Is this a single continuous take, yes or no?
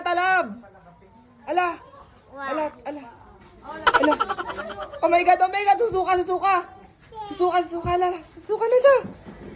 yes